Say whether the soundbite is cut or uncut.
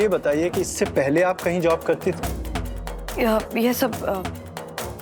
uncut